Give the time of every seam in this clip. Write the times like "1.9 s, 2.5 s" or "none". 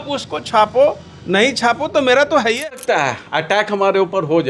2.7 s